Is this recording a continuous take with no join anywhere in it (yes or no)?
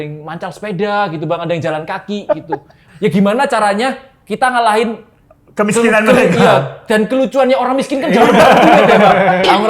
no